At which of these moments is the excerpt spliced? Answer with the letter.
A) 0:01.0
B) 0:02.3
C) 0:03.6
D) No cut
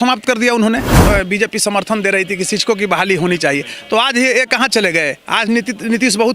A